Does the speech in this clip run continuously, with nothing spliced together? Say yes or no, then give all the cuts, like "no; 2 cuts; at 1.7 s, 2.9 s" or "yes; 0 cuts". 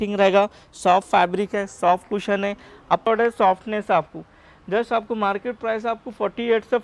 no; 1 cut; at 3.1 s